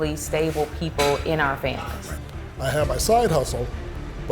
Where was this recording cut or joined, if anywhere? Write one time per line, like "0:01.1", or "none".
0:02.0